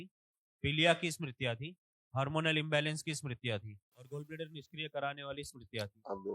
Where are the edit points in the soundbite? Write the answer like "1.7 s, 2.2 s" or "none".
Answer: 4.1 s